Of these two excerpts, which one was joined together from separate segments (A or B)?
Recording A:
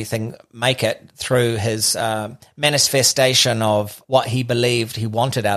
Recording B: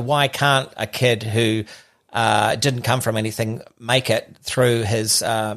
A